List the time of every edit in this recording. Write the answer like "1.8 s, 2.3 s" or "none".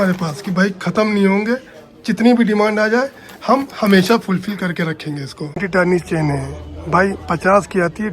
5.6 s